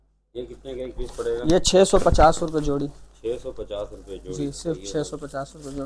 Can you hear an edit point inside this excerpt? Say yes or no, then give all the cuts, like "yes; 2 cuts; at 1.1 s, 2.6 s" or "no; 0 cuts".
no; 0 cuts